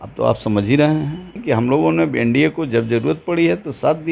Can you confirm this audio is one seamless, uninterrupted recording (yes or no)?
no